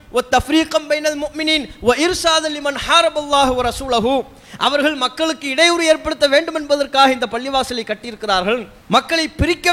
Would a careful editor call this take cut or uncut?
cut